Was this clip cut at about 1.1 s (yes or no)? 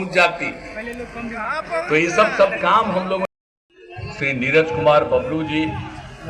no